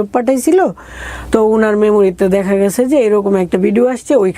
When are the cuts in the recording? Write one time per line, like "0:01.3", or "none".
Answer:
none